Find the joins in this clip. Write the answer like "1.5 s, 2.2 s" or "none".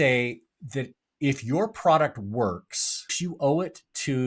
3.2 s